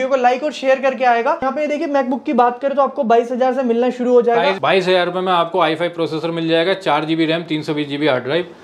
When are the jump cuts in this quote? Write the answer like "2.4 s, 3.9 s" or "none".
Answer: 1.4 s, 4.6 s